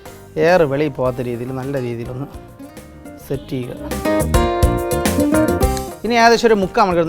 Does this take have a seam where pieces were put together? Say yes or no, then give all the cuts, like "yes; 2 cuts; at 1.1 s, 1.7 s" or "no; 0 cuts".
yes; 2 cuts; at 4.0 s, 5.7 s